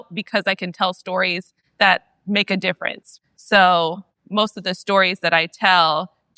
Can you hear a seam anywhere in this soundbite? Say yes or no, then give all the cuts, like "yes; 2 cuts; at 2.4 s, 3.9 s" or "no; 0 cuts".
no; 0 cuts